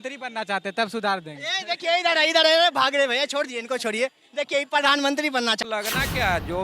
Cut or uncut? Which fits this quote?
cut